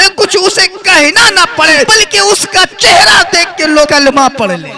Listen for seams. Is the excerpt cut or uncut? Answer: cut